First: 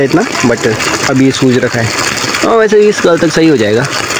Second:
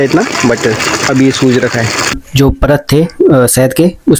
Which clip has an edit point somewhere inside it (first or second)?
second